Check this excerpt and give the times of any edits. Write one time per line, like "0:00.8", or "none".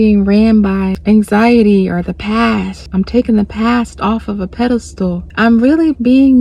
0:01.0
0:02.8
0:05.2